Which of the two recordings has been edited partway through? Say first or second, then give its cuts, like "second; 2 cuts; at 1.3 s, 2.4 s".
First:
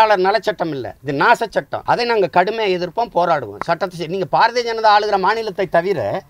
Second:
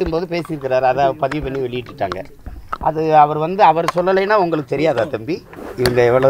first; 2 cuts; at 0.9 s, 1.7 s